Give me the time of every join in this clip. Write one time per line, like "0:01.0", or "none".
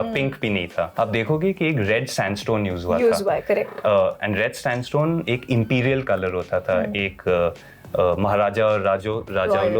0:00.9

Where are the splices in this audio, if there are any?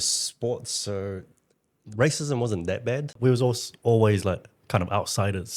0:03.1

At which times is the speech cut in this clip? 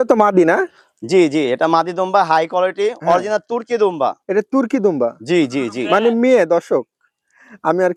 none

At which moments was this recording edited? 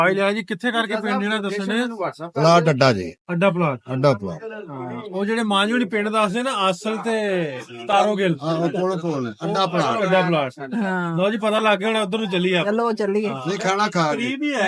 none

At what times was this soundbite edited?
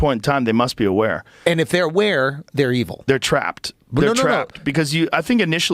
none

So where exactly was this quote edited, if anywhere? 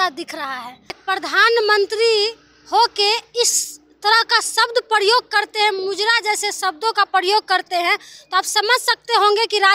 0:01.0

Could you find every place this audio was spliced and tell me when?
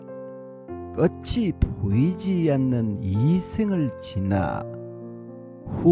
none

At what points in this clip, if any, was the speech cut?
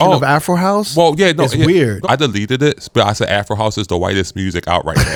none

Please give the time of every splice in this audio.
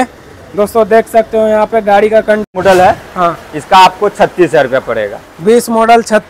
0:02.4

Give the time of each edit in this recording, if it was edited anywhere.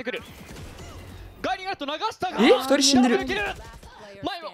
none

